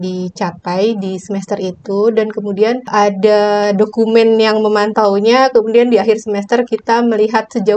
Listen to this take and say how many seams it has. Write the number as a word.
one